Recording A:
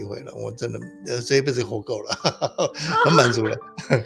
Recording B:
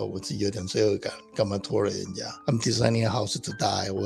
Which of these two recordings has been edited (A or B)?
B